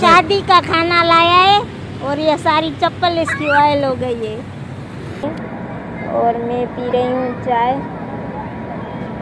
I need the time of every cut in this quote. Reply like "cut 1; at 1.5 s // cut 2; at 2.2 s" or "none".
cut 1; at 5.2 s